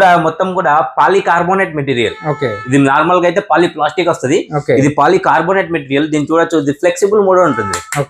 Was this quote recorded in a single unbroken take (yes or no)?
yes